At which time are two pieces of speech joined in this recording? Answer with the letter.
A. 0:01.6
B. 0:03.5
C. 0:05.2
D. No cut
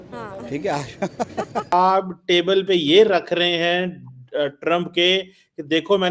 A